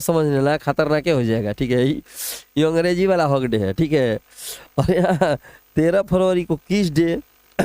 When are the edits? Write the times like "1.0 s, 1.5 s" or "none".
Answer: none